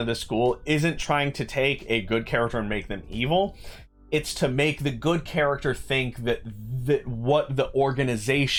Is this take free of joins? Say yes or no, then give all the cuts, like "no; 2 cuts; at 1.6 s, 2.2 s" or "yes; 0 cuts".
yes; 0 cuts